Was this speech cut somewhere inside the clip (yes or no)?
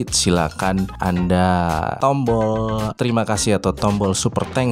yes